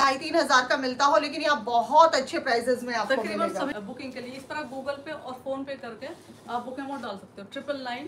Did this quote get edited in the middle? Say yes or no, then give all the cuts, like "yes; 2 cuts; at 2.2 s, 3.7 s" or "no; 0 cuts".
yes; 1 cut; at 3.7 s